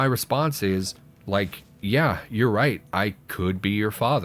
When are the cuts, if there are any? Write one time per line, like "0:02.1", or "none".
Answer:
0:01.4